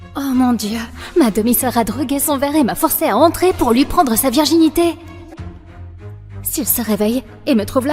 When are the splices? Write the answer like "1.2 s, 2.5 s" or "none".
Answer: none